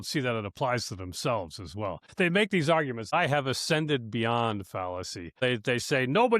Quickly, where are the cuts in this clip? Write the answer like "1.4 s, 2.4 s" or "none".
2.0 s, 3.1 s, 5.4 s